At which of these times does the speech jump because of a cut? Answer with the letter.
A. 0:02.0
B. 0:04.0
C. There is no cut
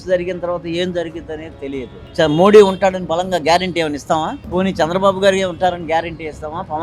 A